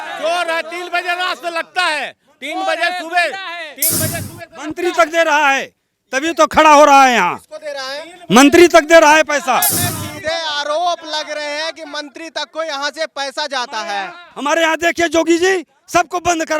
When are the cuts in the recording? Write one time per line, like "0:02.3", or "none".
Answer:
0:09.8